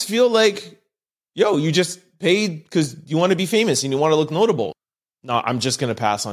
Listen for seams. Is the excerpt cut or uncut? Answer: cut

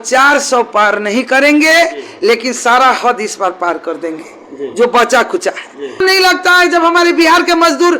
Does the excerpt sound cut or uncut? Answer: cut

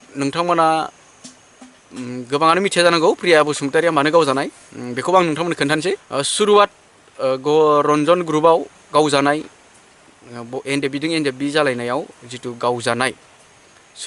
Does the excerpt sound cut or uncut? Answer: cut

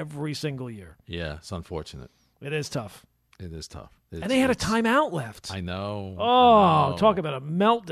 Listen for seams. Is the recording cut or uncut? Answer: uncut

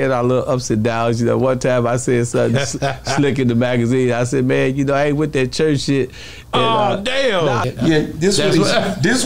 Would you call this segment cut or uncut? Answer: cut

